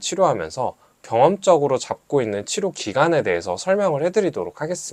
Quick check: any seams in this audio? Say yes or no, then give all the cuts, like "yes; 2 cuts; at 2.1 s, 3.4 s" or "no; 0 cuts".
no; 0 cuts